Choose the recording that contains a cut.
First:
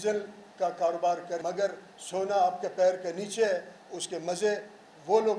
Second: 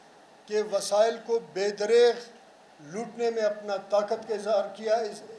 first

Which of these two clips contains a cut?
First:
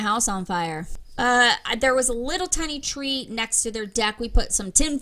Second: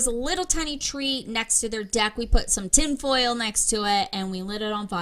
first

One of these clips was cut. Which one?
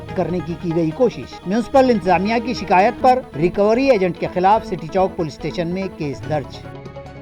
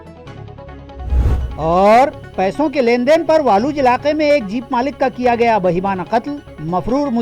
second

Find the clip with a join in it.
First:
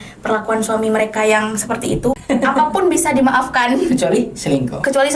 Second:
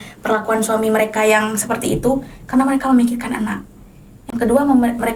first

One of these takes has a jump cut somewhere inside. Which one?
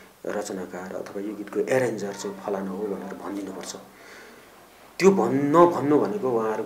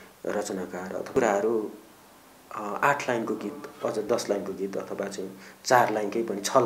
second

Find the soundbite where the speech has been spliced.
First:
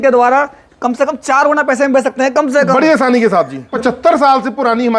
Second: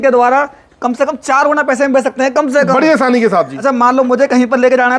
first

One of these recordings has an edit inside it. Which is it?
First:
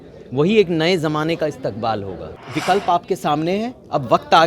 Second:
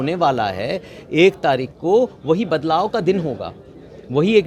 first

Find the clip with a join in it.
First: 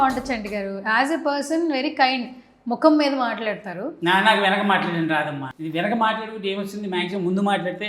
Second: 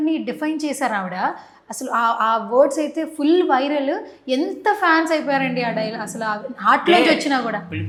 first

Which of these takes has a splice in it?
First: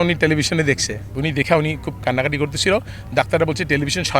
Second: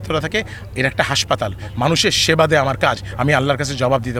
first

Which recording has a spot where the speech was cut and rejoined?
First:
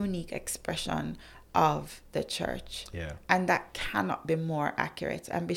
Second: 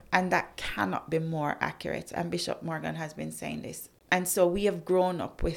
second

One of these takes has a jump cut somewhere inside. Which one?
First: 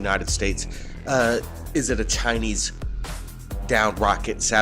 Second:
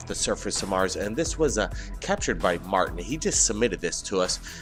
first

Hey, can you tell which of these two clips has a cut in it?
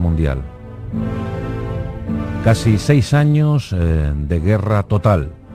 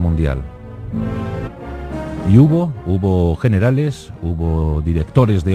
first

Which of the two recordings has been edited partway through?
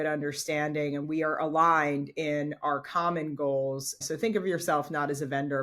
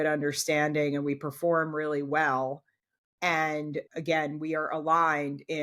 first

